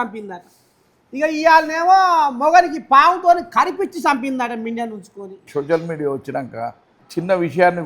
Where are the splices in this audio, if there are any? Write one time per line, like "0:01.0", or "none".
0:05.4